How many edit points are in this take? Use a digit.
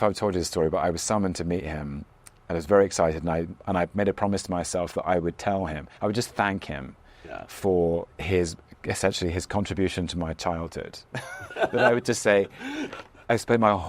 1